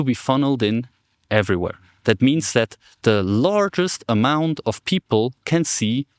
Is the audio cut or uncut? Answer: uncut